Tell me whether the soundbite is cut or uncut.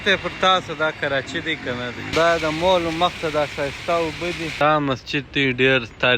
cut